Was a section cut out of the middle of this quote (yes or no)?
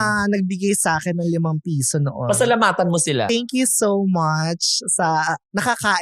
yes